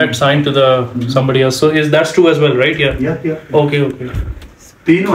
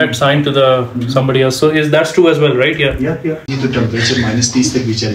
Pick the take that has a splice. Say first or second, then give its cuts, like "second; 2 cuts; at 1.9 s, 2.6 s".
second; 1 cut; at 3.5 s